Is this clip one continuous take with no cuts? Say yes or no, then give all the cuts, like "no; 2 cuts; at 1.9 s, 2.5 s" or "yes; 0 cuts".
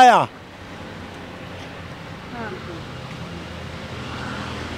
yes; 0 cuts